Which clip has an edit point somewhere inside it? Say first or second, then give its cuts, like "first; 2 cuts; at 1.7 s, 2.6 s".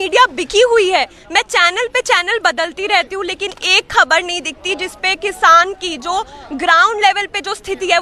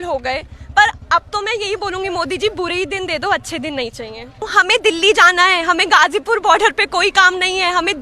second; 1 cut; at 4.5 s